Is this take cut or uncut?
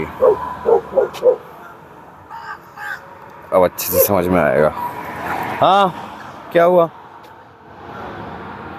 uncut